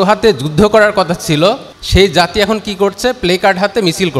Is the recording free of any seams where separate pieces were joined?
no; 1 cut; at 1.7 s

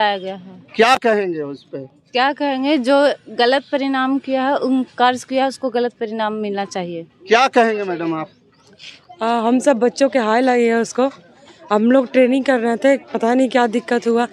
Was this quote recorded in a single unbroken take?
yes; 0 cuts

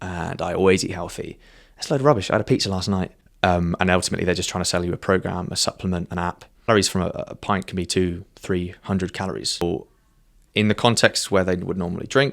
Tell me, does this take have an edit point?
yes; 3 cuts; at 3.2 s, 6.7 s, 9.6 s

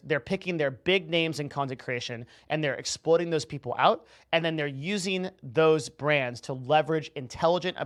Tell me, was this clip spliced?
no; 0 cuts

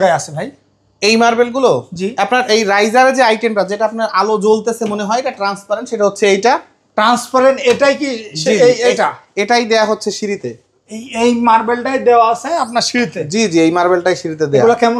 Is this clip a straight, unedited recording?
yes; 0 cuts

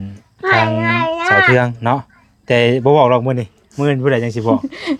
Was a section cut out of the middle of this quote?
no; 0 cuts

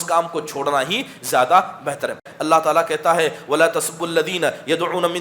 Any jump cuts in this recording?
yes; 1 cut; at 2.3 s

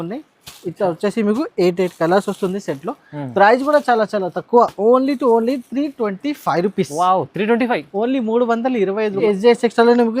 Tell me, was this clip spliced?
yes; 1 cut; at 9.2 s

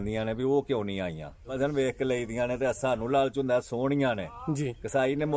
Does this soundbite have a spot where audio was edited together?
yes; 1 cut; at 1.5 s

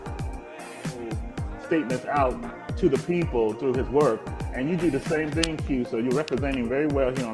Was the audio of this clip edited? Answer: yes; 1 cut; at 1.2 s

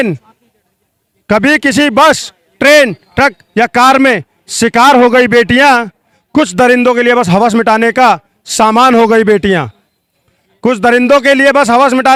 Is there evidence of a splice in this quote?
no; 0 cuts

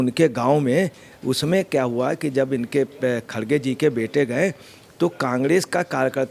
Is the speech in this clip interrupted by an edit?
no; 0 cuts

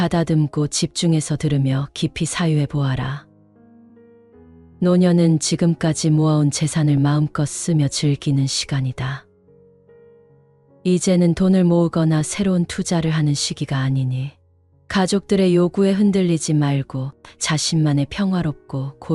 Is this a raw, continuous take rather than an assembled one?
no; 2 cuts; at 3.2 s, 4.7 s

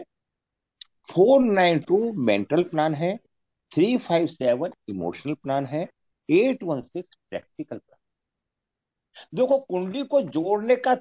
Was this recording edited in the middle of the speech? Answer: no; 0 cuts

